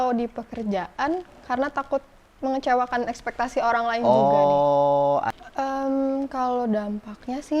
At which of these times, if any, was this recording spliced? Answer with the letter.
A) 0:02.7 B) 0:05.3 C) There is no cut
B